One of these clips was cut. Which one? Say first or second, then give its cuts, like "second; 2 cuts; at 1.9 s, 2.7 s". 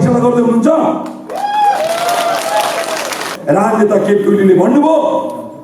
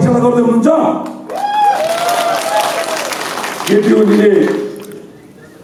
first; 1 cut; at 3.3 s